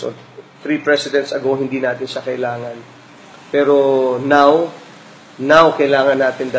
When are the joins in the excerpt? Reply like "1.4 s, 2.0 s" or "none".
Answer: none